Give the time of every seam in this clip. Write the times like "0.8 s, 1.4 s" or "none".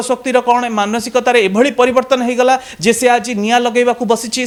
none